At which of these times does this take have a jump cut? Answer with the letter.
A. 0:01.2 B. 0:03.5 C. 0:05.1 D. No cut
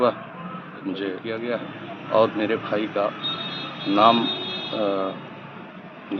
A